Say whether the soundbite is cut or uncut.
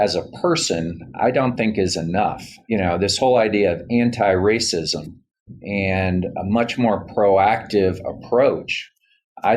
cut